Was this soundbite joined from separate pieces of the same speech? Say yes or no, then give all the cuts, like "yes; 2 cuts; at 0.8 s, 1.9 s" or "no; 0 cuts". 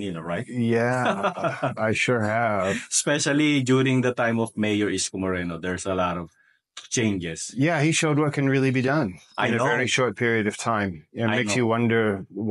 no; 0 cuts